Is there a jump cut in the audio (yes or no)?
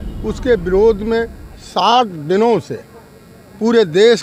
no